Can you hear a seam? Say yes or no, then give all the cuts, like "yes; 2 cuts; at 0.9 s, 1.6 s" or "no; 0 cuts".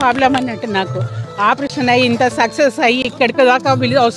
no; 0 cuts